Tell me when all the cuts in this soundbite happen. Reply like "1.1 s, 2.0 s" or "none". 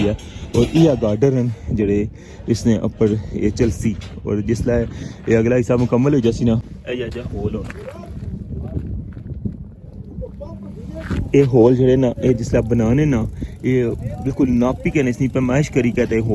6.6 s